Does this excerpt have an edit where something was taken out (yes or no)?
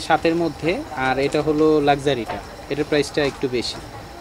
no